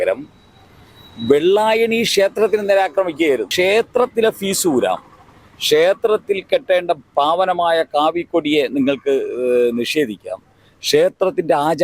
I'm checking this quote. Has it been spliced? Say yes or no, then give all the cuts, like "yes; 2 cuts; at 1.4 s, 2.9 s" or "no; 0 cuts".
yes; 1 cut; at 3.5 s